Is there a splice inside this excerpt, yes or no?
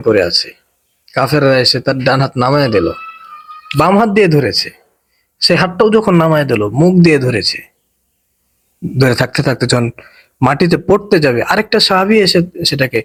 no